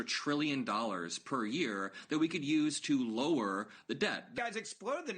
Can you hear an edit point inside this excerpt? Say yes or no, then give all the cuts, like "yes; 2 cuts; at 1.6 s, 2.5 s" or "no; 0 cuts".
yes; 1 cut; at 4.3 s